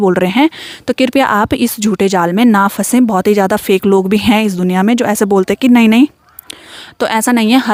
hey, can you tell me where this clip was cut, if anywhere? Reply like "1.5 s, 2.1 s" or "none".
none